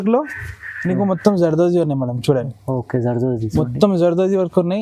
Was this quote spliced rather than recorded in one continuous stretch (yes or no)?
no